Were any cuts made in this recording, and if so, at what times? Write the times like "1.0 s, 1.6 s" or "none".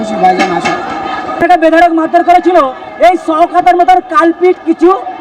1.3 s